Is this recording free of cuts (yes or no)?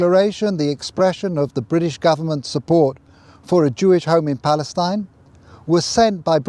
yes